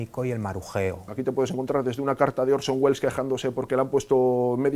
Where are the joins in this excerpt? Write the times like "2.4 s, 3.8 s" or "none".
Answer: 1.0 s